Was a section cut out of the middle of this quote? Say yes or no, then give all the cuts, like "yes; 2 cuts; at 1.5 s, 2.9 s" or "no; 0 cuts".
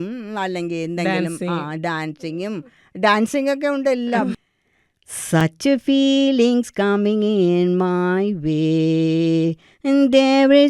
yes; 1 cut; at 4.4 s